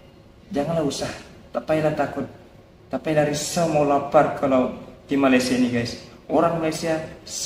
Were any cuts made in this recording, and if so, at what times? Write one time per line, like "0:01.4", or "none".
none